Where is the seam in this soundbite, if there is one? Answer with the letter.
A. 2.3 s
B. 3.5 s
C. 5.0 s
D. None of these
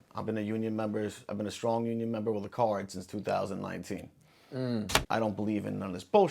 C